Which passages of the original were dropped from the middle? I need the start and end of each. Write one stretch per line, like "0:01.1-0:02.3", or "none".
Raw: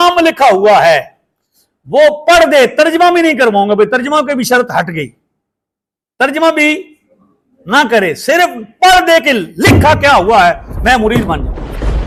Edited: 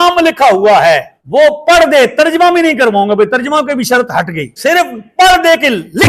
0:01.2-0:01.8
0:05.1-0:08.2